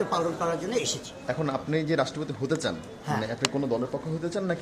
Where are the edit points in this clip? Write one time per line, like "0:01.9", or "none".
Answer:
0:01.2

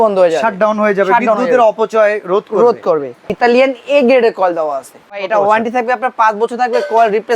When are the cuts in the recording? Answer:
0:03.3
0:05.2

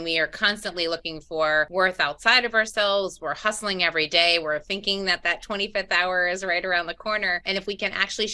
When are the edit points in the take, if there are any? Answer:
0:01.7

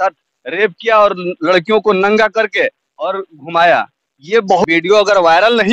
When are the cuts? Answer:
0:04.6

